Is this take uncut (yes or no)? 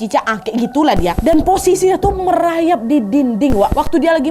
no